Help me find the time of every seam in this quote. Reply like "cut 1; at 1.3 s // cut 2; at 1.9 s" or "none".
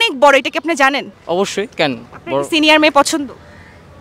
cut 1; at 1.1 s